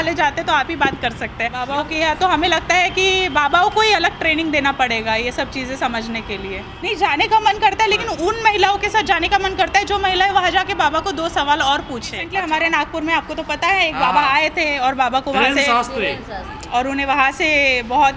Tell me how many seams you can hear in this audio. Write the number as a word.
three